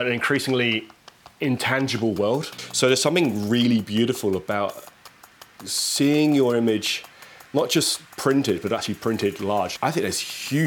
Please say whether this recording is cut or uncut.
cut